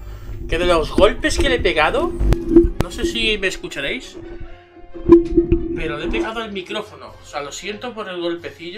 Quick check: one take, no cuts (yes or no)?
yes